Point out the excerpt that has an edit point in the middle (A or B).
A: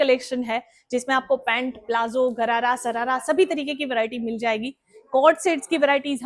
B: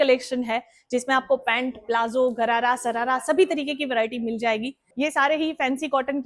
B